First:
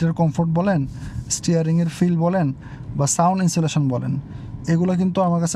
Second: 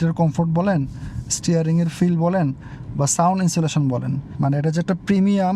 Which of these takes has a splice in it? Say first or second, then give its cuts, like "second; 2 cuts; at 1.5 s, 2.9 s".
second; 1 cut; at 4.2 s